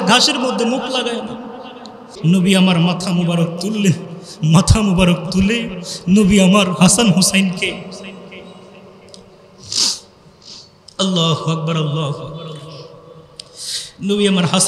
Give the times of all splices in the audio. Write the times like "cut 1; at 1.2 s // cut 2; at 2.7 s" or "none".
cut 1; at 2.1 s